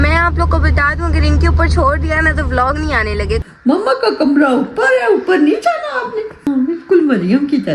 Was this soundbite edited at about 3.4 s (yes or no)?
yes